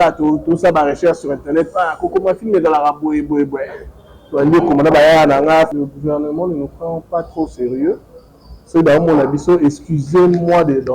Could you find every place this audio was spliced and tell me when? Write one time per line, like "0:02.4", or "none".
0:05.7